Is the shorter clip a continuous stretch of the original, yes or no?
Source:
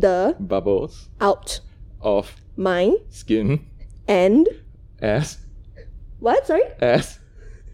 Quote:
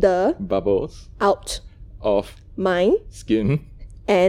yes